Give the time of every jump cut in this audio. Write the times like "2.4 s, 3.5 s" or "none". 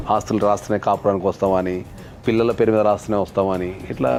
none